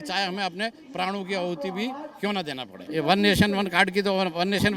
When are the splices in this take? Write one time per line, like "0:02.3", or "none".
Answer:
0:02.7

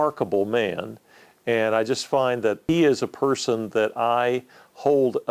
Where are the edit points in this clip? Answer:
0:02.6

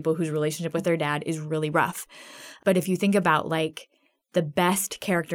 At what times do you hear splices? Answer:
0:02.5

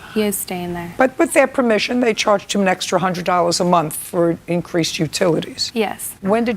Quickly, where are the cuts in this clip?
0:01.1
0:05.8

